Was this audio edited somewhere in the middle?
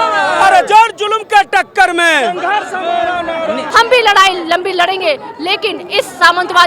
yes; 1 cut; at 3.7 s

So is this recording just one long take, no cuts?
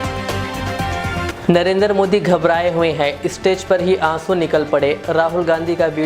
no; 1 cut; at 1.3 s

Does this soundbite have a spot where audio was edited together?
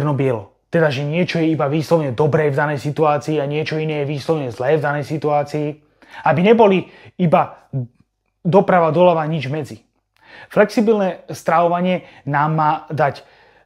no; 0 cuts

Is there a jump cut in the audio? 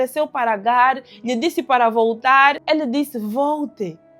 yes; 1 cut; at 2.6 s

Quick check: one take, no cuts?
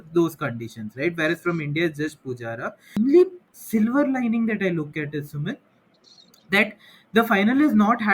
no; 1 cut; at 3.0 s

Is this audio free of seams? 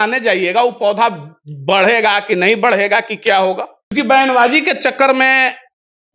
no; 1 cut; at 3.8 s

